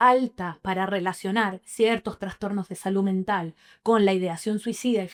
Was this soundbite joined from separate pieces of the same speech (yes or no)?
no